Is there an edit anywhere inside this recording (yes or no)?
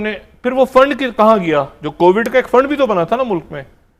no